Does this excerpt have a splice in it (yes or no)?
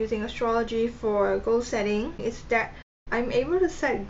yes